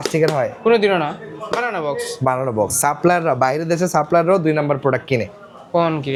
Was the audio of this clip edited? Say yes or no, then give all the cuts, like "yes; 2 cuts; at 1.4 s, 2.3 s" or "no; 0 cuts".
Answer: no; 0 cuts